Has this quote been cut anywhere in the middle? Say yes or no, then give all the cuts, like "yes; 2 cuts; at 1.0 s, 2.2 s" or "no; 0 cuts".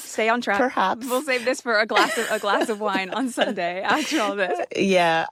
no; 0 cuts